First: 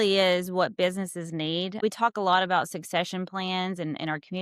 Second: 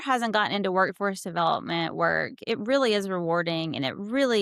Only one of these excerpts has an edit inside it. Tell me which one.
first; 1 cut; at 1.8 s

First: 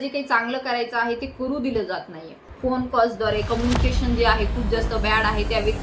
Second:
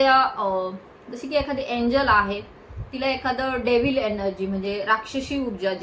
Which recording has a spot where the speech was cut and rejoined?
first; 1 cut; at 2.4 s

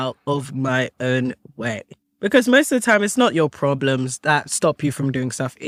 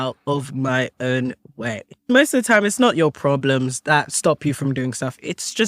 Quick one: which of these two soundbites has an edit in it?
second; 1 cut; at 2.1 s

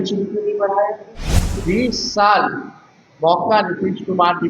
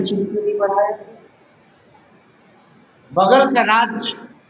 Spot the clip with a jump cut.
first; 1 cut; at 1.5 s

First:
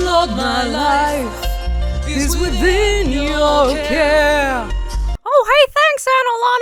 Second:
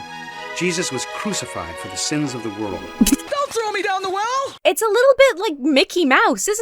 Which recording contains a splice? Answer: second; 2 cuts; at 3.2 s, 4.6 s

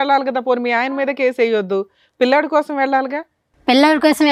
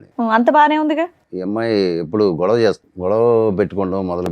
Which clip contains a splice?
second; 2 cuts; at 1.3 s, 2.9 s

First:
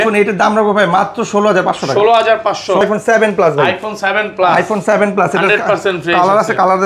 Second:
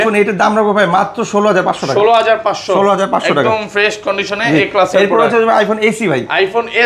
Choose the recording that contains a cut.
first; 1 cut; at 2.8 s

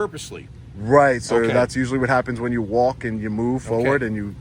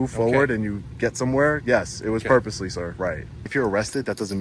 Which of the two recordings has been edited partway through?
second; 1 cut; at 3.4 s

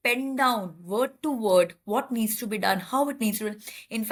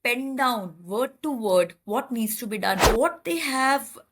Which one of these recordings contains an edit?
second; 1 cut; at 2.9 s

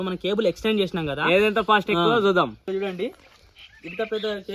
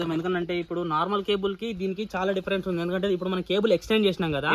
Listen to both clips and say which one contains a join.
first; 1 cut; at 2.6 s

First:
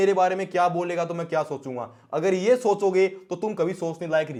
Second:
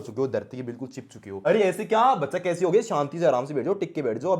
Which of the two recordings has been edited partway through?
second; 1 cut; at 1.3 s

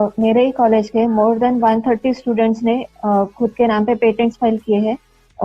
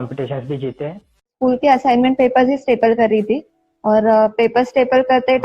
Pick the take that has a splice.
second; 1 cut; at 1.3 s

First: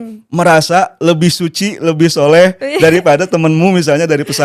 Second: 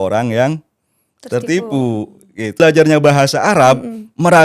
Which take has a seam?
second; 1 cut; at 2.6 s

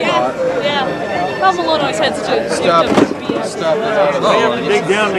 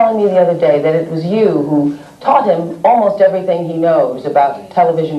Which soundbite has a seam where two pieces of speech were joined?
second; 1 cut; at 1.5 s

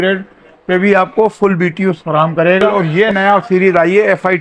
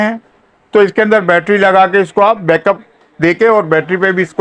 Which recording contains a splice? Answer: first; 1 cut; at 2.7 s

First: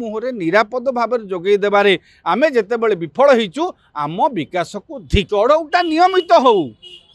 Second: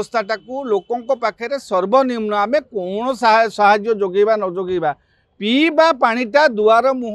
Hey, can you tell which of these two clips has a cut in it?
first; 1 cut; at 5.3 s

